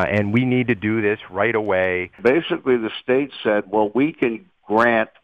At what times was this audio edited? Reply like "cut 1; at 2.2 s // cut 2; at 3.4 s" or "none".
cut 1; at 2.2 s